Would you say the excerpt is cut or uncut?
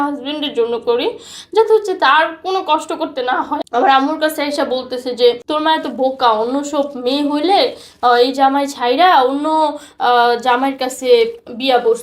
cut